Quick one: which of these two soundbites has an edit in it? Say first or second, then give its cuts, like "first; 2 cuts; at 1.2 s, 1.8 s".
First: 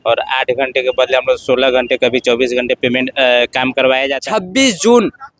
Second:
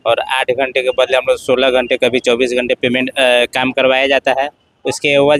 first; 1 cut; at 4.2 s